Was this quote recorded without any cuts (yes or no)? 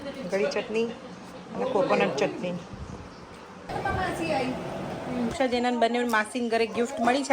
no